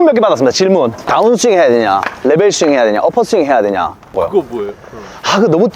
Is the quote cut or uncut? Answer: cut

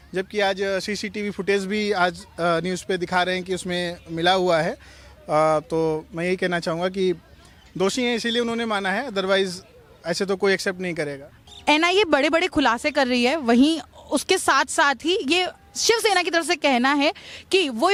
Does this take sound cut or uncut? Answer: uncut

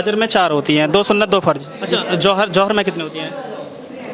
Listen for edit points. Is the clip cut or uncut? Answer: cut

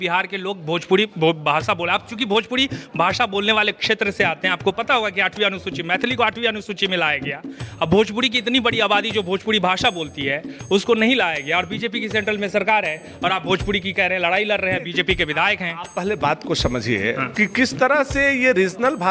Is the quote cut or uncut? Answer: uncut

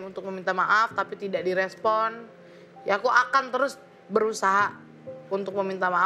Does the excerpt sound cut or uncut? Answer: uncut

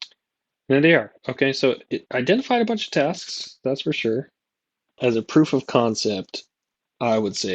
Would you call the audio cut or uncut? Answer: cut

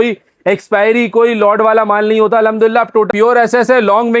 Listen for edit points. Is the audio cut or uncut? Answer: cut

